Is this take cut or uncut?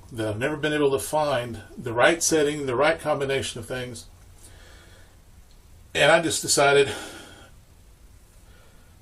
uncut